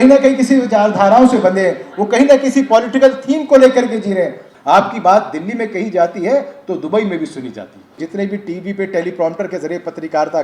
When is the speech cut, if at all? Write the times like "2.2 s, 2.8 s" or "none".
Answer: 4.5 s, 8.0 s